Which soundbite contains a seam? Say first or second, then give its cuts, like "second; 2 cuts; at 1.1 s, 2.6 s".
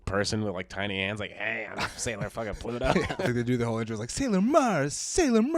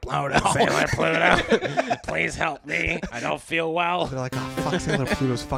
first; 1 cut; at 3.3 s